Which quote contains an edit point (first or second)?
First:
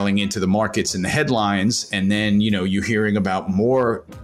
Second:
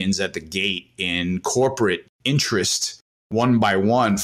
second